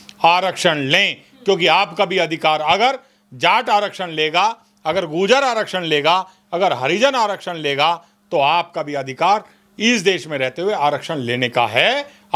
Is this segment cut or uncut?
uncut